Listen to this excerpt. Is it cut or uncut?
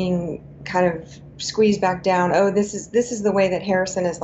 uncut